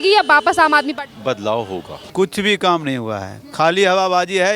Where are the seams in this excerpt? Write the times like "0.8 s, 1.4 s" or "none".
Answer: 2.0 s